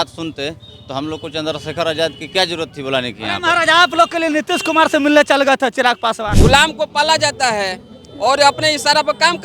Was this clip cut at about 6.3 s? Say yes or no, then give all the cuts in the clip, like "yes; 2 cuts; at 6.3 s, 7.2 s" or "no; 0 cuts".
yes; 1 cut; at 6.3 s